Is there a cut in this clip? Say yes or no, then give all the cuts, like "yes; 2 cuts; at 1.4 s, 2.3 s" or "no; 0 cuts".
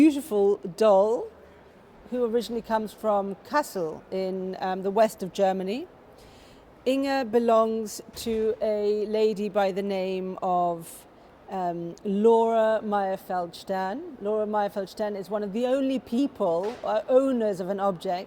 no; 0 cuts